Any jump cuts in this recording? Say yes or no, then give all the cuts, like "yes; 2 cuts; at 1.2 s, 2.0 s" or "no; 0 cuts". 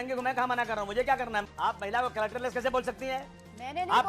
yes; 1 cut; at 1.4 s